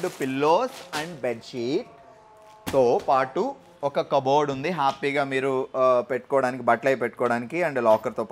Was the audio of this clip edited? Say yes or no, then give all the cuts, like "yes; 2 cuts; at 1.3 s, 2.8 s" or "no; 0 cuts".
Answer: no; 0 cuts